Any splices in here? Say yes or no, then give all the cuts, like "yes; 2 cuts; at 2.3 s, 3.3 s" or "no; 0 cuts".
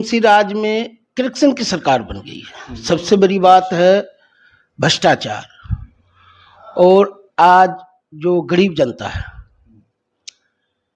no; 0 cuts